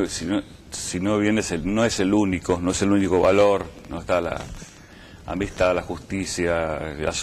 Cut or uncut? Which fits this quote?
cut